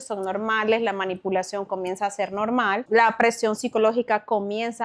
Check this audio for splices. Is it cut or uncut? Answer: cut